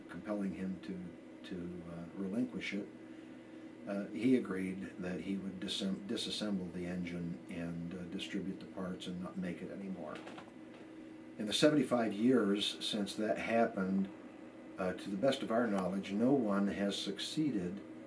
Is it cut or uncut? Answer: cut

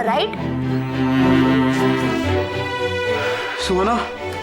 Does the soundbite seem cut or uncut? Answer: uncut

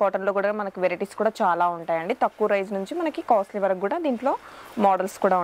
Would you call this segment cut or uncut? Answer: uncut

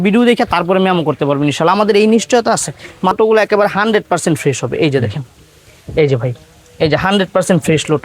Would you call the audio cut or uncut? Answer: cut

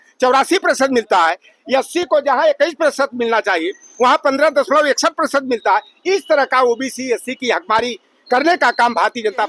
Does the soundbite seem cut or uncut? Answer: uncut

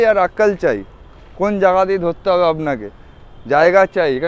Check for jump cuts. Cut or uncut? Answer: uncut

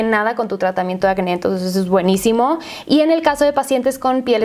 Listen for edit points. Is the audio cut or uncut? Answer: uncut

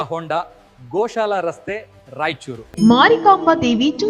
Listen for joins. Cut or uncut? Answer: cut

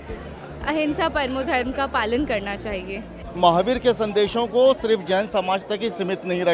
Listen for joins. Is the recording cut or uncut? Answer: cut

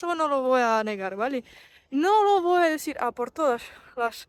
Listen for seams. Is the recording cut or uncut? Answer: uncut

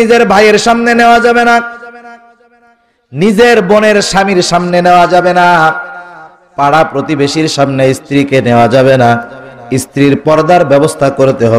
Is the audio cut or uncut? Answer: uncut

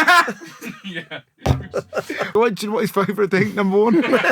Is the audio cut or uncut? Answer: cut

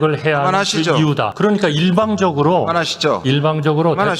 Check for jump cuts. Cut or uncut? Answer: cut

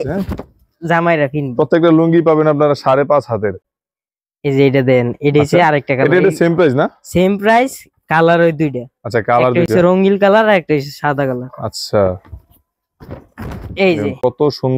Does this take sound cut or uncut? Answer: uncut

